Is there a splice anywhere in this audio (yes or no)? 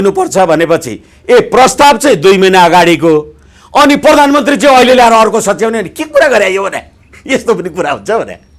no